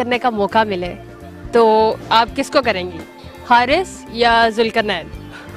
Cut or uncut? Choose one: uncut